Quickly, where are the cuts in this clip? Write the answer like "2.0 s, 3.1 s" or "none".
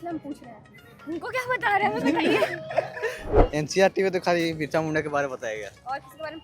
3.3 s